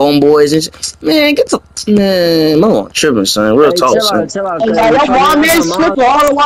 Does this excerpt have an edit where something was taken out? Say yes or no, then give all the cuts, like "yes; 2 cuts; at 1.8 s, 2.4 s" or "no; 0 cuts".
no; 0 cuts